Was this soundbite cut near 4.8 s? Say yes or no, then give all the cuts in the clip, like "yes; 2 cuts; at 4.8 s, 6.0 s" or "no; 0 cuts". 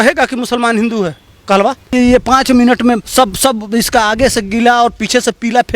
no; 2 cuts; at 1.9 s, 3.1 s